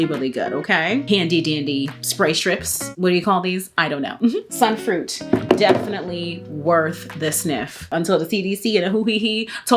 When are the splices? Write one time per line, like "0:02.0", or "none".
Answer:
0:01.0
0:04.5
0:07.9